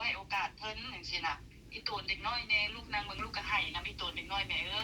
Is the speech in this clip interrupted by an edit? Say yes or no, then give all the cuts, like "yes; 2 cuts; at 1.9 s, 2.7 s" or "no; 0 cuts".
no; 0 cuts